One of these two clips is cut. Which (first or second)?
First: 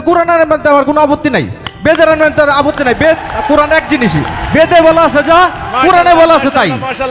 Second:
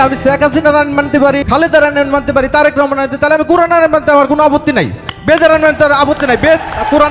second